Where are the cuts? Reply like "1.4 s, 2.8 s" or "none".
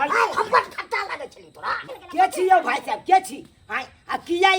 1.9 s